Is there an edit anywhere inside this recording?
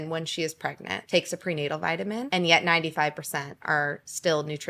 yes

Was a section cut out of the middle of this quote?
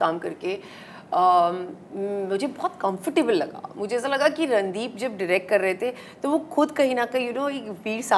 no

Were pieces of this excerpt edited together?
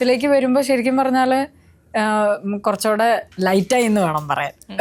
no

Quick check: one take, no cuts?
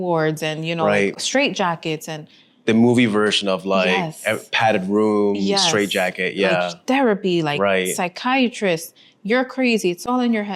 yes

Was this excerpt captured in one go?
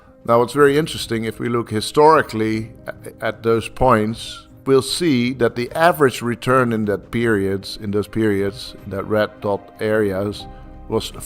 no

